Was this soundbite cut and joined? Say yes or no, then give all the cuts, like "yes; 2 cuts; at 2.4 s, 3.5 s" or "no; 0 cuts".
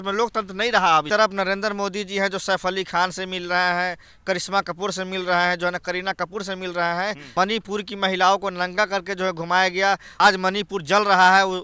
yes; 3 cuts; at 1.1 s, 7.2 s, 10.1 s